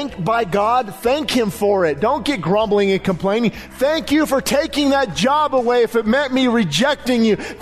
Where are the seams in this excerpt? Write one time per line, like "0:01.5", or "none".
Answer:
0:03.6